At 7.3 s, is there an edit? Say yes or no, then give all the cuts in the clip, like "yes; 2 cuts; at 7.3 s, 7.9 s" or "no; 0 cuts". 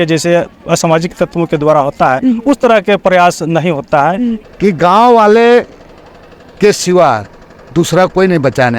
no; 1 cut; at 4.4 s